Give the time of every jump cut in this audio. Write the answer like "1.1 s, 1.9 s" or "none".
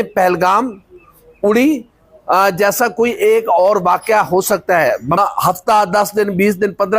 5.2 s